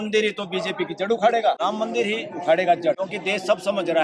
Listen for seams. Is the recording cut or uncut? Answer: cut